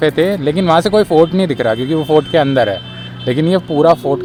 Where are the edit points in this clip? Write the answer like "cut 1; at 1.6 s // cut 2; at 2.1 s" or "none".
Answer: none